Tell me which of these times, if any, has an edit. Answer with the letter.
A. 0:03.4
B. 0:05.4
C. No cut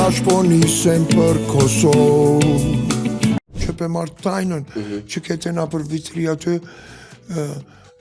A